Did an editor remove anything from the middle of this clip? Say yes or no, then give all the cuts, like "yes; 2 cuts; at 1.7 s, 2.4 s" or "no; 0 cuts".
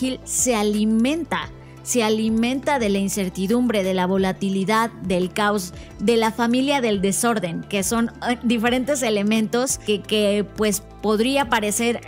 yes; 1 cut; at 9.8 s